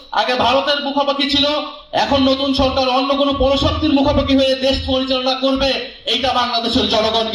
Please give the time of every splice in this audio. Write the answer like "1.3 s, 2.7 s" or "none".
none